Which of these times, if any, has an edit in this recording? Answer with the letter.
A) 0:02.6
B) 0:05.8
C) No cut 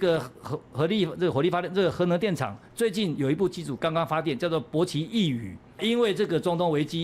B